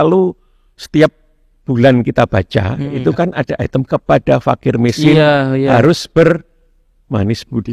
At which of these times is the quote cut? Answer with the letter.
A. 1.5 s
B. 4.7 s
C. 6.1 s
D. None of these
D